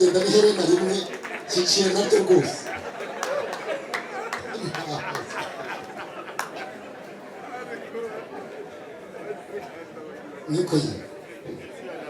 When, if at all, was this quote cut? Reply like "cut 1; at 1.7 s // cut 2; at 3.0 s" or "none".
none